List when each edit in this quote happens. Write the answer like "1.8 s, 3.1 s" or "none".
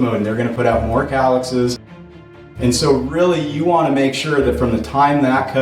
1.9 s